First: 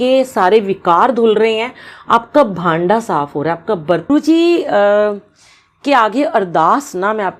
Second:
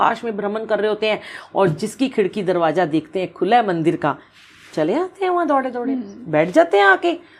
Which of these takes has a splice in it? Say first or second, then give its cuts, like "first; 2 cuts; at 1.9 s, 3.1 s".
first; 1 cut; at 4.1 s